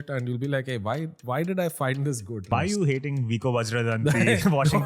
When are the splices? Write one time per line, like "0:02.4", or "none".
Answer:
0:02.5